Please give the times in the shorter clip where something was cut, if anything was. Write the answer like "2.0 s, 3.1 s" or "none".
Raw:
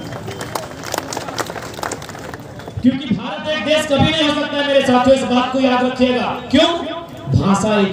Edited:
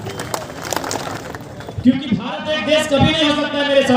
1.1 s